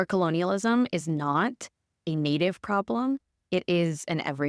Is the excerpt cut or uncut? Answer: uncut